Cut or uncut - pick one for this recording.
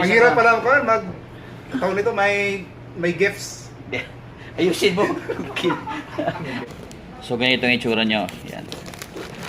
cut